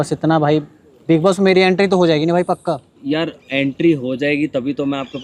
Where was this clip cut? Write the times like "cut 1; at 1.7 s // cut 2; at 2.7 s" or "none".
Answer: cut 1; at 2.9 s